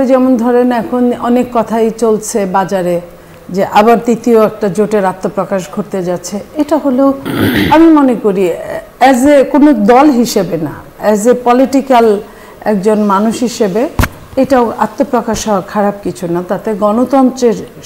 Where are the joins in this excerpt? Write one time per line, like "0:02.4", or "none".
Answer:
none